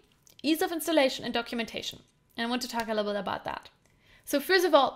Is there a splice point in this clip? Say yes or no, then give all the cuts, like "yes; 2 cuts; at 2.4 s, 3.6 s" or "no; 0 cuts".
no; 0 cuts